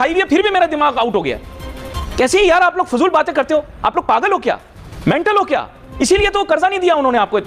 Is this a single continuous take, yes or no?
yes